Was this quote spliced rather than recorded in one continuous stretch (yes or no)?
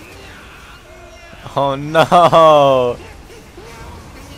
no